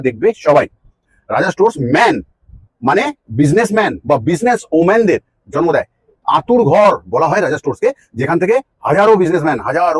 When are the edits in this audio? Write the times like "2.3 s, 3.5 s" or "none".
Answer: 1.1 s